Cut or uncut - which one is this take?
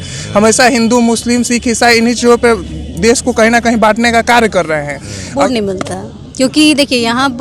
cut